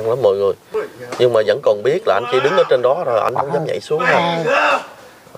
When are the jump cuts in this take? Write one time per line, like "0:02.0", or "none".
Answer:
none